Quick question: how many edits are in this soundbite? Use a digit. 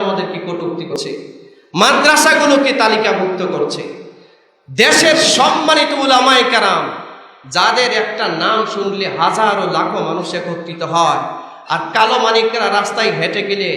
1